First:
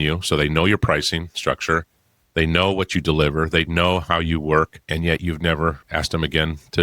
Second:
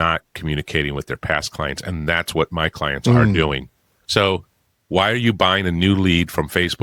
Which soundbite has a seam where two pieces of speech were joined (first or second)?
first